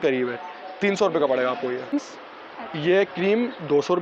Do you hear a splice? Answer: yes; 1 cut; at 1.9 s

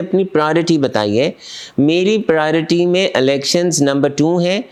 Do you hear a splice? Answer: no; 0 cuts

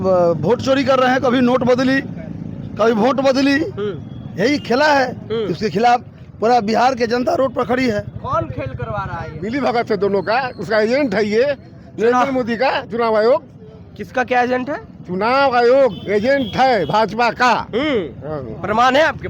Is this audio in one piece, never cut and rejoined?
no; 1 cut; at 9.4 s

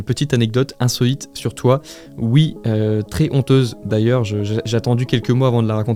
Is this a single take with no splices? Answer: yes; 0 cuts

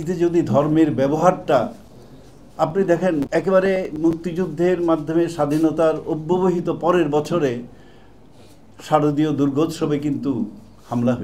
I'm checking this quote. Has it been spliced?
no; 0 cuts

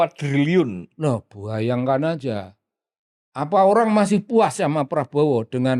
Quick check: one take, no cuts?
yes; 0 cuts

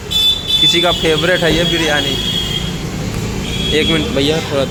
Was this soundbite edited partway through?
no; 0 cuts

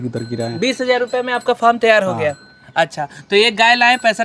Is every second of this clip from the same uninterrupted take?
yes; 0 cuts

